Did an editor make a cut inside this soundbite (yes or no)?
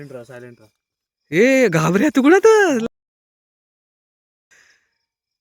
no